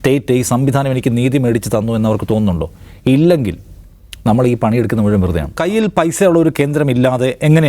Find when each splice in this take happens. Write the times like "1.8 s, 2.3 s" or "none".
5.5 s